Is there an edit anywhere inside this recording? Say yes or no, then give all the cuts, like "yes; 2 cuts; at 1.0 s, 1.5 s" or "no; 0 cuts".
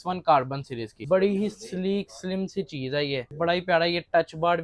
yes; 2 cuts; at 0.9 s, 3.3 s